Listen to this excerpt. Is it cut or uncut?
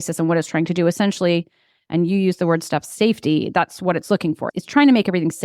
cut